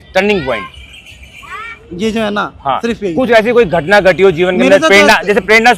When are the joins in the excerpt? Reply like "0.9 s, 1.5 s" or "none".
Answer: none